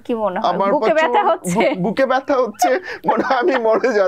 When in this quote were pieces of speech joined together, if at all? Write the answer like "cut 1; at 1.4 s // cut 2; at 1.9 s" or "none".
none